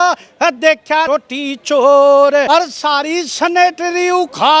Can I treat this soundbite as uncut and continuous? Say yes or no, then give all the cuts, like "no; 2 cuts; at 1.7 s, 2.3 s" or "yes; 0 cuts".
no; 2 cuts; at 1.1 s, 2.5 s